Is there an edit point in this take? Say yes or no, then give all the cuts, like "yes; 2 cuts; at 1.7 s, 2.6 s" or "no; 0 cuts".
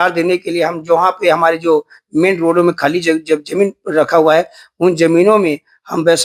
no; 0 cuts